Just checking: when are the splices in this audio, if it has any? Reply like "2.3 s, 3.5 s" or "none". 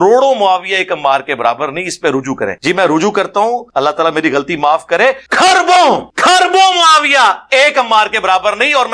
2.6 s, 3.7 s, 5.2 s, 6.1 s